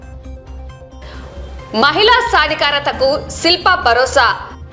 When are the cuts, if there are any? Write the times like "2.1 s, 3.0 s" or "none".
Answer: 0.9 s

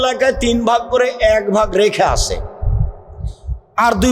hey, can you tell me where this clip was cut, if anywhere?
none

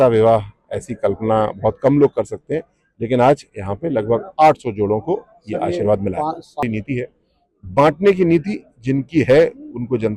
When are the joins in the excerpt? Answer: 6.6 s

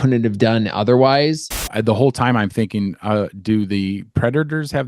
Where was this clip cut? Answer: 1.5 s

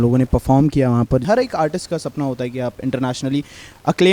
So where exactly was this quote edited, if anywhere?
1.2 s

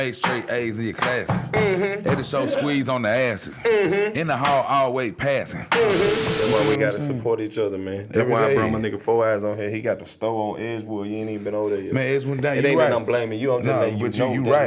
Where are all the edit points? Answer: 6.3 s

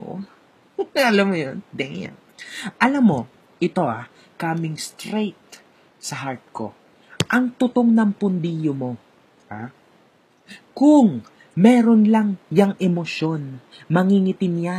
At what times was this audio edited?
none

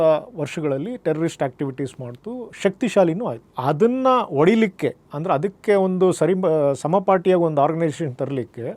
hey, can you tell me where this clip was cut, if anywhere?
none

